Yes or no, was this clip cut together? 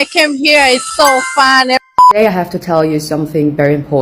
yes